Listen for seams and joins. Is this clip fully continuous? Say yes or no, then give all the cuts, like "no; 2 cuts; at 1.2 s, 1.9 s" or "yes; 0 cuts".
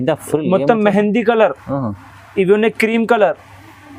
yes; 0 cuts